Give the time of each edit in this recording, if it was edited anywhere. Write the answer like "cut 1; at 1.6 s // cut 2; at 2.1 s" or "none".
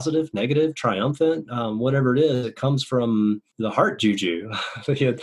cut 1; at 3.5 s